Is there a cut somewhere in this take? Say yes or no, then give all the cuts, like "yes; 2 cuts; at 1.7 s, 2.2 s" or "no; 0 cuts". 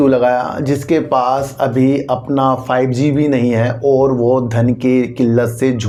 no; 0 cuts